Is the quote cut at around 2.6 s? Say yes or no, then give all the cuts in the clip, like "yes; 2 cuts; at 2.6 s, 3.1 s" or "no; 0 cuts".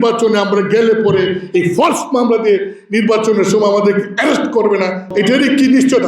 no; 1 cut; at 5.0 s